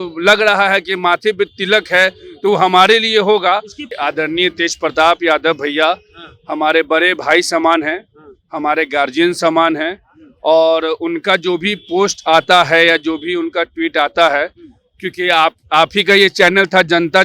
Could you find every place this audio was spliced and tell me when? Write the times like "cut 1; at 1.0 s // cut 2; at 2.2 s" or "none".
cut 1; at 3.9 s